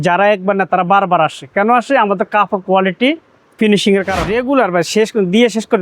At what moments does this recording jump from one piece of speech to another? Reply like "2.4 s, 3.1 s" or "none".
4.2 s